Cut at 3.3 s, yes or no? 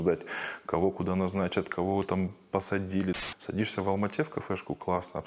yes